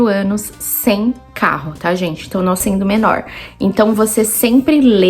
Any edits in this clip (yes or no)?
yes